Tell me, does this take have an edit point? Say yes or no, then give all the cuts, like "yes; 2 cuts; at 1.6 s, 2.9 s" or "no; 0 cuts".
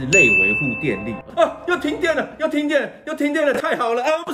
yes; 1 cut; at 1.2 s